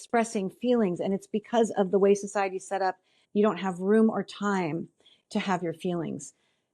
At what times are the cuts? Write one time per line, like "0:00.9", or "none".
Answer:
0:03.2